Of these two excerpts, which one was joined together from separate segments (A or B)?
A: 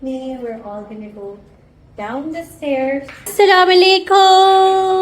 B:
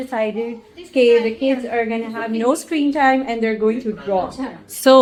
A